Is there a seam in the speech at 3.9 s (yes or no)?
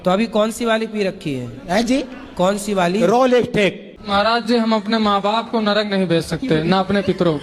yes